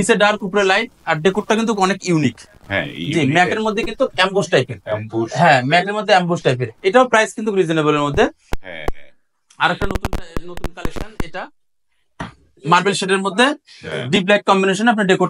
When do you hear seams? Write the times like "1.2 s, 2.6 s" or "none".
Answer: none